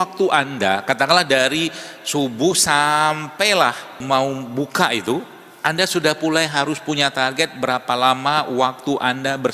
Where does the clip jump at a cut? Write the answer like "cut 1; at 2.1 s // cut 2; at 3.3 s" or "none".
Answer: cut 1; at 4.0 s